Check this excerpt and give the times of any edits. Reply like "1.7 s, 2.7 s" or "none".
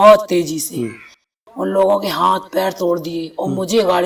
none